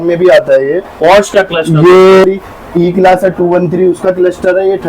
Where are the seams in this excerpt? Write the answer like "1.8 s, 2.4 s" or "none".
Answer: 2.3 s